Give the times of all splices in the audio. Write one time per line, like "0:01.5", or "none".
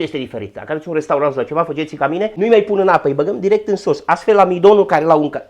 0:02.3